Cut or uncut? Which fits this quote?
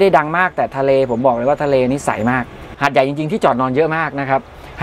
cut